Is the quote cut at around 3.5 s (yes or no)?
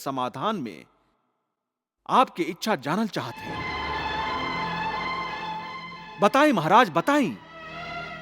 yes